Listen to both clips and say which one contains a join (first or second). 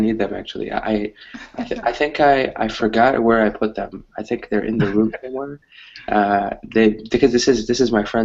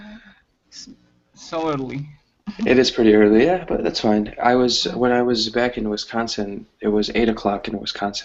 first